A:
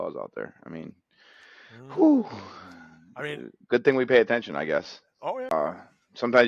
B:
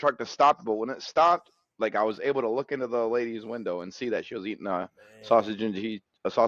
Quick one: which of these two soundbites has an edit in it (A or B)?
A